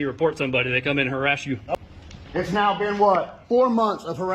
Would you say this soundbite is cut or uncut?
cut